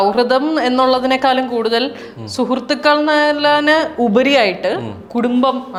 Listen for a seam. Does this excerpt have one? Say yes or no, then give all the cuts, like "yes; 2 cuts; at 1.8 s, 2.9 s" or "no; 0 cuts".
no; 0 cuts